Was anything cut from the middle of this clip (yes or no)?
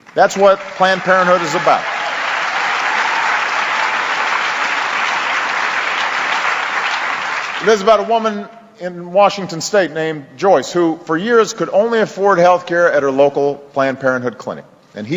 yes